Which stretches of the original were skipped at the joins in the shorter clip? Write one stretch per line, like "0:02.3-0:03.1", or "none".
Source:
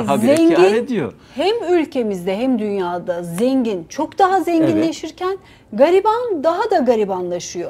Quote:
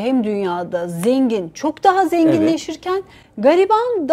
none